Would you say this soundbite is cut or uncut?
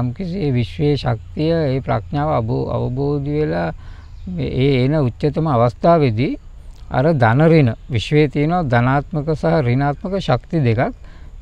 uncut